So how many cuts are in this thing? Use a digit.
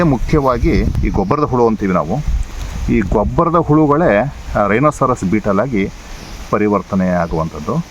1